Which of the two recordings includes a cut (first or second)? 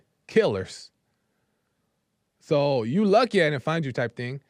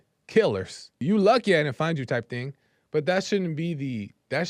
second